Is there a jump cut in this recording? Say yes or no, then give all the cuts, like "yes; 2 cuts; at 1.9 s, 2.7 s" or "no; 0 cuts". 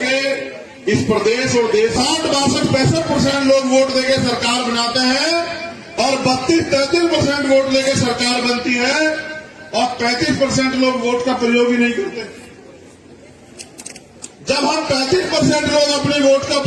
yes; 1 cut; at 2.0 s